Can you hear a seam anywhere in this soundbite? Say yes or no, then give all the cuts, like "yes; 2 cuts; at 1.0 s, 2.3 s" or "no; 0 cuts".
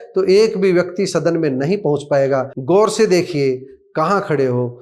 yes; 1 cut; at 2.5 s